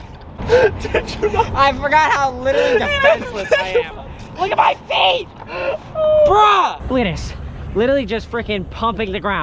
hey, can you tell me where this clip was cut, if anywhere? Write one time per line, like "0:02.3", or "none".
0:06.8